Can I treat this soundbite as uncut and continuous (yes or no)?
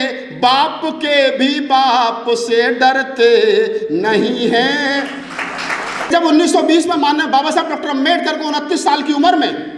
no